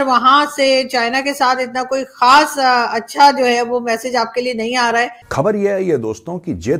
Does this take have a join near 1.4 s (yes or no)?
no